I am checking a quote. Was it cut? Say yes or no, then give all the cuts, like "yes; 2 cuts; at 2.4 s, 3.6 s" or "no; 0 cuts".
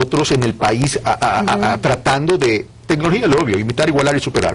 yes; 1 cut; at 3.3 s